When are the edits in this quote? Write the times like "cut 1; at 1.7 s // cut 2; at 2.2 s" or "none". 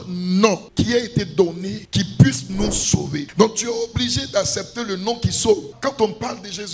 cut 1; at 3.3 s